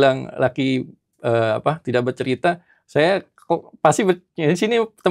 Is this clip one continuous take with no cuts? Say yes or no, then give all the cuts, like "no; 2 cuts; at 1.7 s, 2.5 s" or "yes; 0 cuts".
yes; 0 cuts